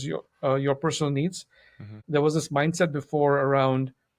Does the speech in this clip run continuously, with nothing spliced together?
no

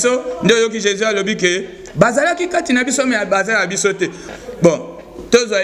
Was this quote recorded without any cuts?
no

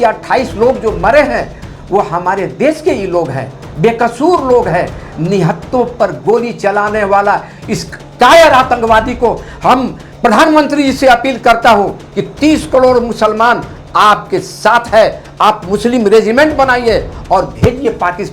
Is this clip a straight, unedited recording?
no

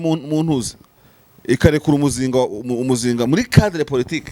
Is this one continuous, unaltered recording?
yes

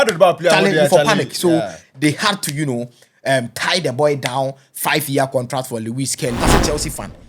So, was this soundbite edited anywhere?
yes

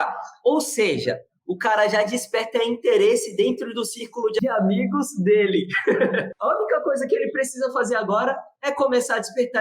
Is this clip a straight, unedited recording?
no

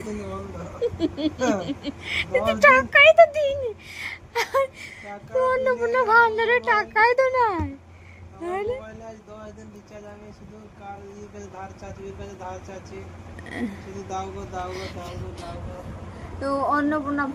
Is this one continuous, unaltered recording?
yes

